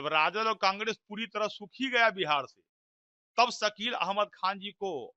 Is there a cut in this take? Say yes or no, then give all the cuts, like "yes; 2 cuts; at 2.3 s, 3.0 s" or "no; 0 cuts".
no; 0 cuts